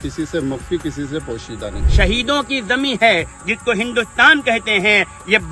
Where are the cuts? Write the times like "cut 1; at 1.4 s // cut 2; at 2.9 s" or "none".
cut 1; at 1.8 s